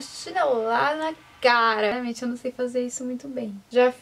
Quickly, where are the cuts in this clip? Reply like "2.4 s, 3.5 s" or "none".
1.9 s